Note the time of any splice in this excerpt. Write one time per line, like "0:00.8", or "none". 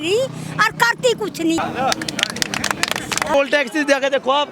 0:01.6
0:03.3